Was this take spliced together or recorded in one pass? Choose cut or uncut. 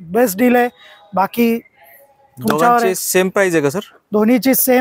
uncut